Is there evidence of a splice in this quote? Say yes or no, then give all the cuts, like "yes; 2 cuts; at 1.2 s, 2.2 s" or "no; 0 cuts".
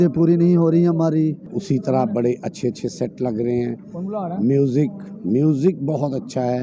yes; 1 cut; at 1.5 s